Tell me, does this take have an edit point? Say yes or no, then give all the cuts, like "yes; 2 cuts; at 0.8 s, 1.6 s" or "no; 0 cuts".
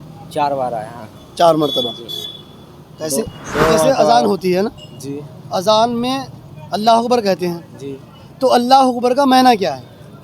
yes; 1 cut; at 3.9 s